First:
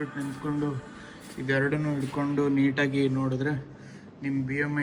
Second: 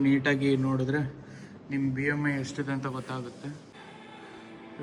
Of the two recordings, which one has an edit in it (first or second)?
second